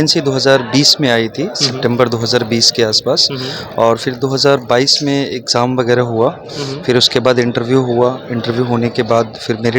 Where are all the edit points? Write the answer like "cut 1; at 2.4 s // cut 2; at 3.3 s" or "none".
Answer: none